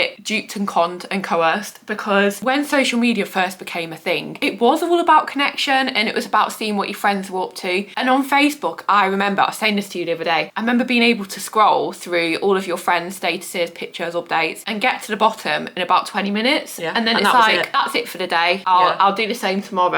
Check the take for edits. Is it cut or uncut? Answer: uncut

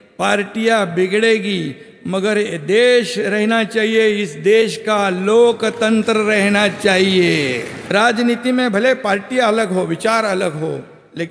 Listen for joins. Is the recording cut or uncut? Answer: cut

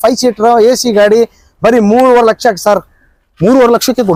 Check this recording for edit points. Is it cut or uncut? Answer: uncut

